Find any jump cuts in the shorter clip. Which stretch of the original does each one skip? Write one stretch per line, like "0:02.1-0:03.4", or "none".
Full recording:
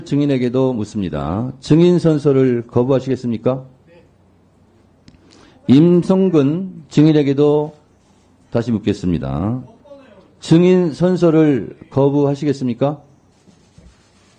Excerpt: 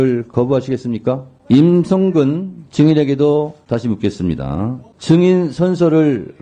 0:03.7-0:05.5
0:07.8-0:08.4
0:09.7-0:10.3